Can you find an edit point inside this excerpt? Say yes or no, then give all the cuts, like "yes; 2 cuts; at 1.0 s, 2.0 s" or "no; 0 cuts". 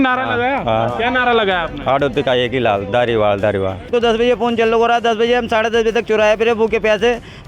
yes; 1 cut; at 3.9 s